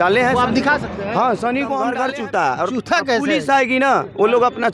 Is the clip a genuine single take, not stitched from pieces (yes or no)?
no